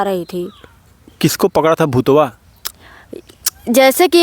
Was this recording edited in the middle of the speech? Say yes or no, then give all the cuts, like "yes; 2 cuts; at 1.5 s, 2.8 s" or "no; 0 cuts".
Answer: no; 0 cuts